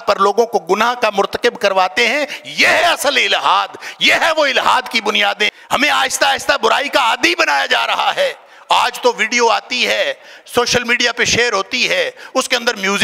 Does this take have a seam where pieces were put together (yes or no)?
yes